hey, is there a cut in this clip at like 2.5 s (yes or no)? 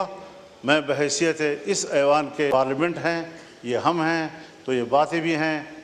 yes